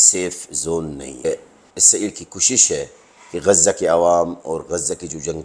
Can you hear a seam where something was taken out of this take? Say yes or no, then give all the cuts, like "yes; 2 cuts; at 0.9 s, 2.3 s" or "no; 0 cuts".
yes; 1 cut; at 1.2 s